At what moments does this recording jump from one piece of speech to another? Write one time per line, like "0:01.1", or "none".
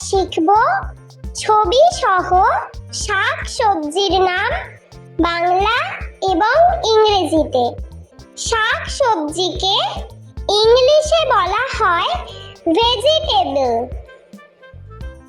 0:14.2